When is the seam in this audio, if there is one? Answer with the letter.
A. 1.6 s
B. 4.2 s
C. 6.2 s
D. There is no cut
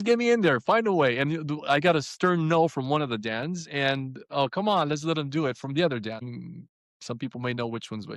C